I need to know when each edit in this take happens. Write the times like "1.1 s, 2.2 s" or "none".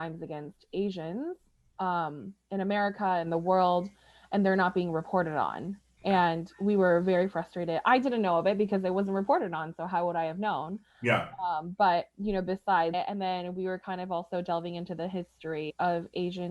12.9 s, 15.7 s